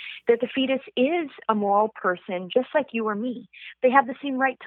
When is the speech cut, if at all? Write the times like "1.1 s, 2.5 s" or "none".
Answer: none